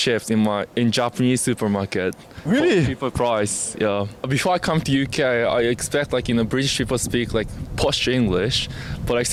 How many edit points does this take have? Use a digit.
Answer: 0